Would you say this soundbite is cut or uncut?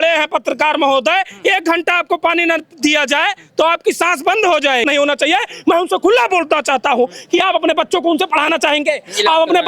cut